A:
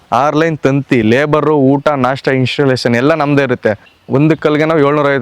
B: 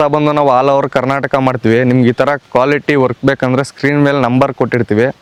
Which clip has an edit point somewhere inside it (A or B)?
A